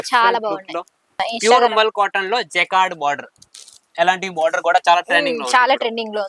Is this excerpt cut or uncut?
cut